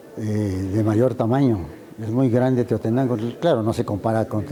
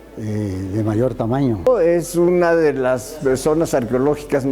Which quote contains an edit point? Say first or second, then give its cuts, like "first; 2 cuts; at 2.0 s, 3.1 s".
second; 1 cut; at 1.7 s